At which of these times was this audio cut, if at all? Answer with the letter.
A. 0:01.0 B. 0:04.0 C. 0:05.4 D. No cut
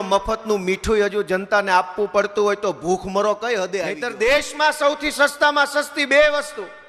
B